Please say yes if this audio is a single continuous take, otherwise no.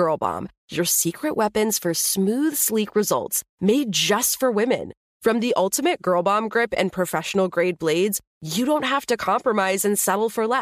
yes